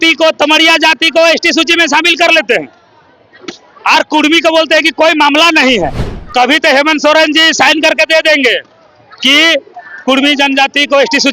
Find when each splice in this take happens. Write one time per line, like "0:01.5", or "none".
0:06.0